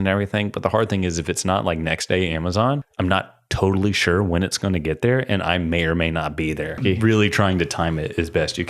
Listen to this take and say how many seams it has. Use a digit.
2